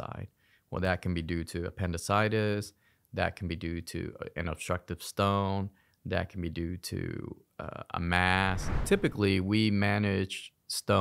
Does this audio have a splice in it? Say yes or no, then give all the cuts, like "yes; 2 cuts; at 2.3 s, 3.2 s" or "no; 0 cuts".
yes; 1 cut; at 8.7 s